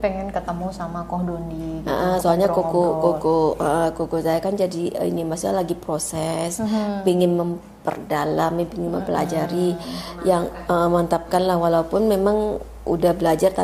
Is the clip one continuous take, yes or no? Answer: yes